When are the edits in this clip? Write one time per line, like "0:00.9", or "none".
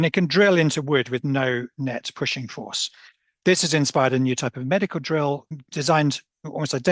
0:05.5